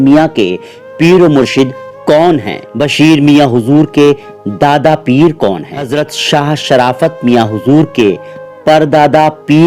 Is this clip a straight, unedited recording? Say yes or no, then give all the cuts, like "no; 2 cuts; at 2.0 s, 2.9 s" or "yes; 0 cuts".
no; 2 cuts; at 2.6 s, 5.9 s